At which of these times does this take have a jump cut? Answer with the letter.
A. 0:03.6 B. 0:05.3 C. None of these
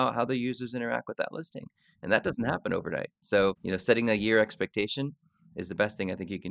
A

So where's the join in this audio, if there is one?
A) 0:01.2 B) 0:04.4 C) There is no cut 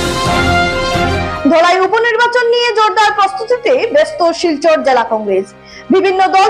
A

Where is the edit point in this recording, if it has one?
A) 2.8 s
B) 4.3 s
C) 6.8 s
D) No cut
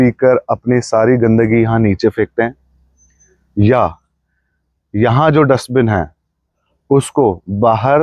D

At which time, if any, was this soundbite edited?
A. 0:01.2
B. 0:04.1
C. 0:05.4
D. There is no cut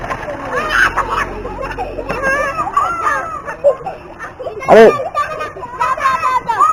D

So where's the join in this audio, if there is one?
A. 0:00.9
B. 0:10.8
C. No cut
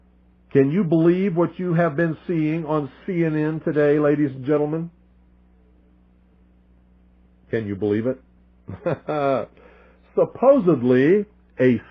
B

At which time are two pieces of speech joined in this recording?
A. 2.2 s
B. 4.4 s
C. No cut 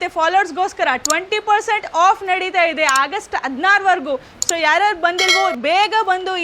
C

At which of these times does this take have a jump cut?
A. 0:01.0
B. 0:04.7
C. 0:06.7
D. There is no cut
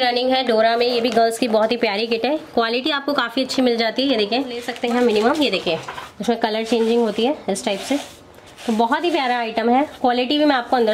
B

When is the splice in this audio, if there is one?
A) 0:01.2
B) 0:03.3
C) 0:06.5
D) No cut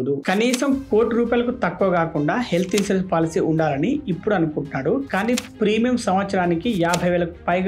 D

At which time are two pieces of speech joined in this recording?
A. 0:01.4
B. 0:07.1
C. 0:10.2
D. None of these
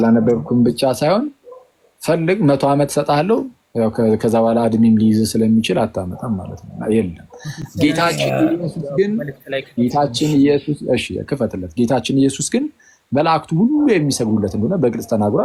D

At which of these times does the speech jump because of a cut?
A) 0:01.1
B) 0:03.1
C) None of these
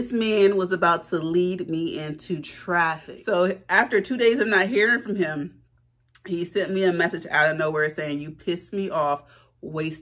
B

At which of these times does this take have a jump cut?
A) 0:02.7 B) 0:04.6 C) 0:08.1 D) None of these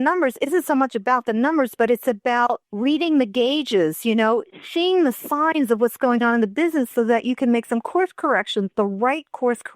A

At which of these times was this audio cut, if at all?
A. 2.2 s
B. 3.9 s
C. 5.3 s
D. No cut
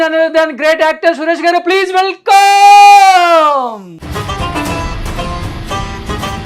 B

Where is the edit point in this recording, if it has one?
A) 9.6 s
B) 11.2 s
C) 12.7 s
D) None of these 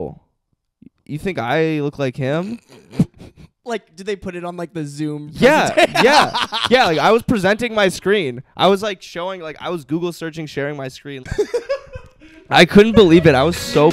B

